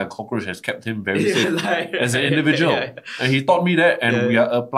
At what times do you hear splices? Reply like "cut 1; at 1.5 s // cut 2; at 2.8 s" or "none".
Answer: none

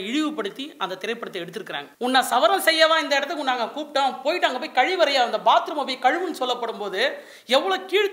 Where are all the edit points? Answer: cut 1; at 1.8 s

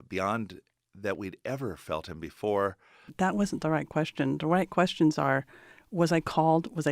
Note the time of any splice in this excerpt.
cut 1; at 3.1 s

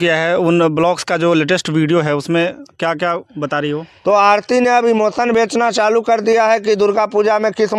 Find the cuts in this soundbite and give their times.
cut 1; at 3.9 s

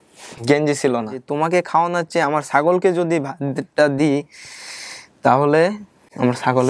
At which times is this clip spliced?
cut 1; at 1.3 s

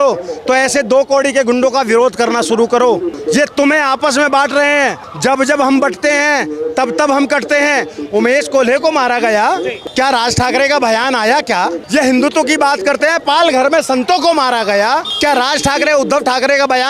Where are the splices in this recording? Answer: cut 1; at 3.1 s // cut 2; at 5.1 s // cut 3; at 9.8 s // cut 4; at 15.1 s

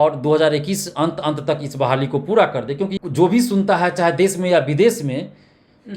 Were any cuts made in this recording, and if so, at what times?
cut 1; at 2.9 s

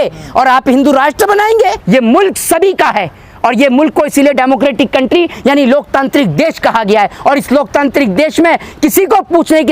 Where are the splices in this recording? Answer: cut 1; at 1.8 s

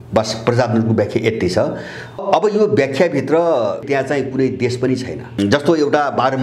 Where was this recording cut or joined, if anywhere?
cut 1; at 2.2 s // cut 2; at 3.8 s // cut 3; at 5.4 s

